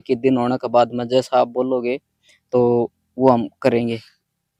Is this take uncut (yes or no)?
yes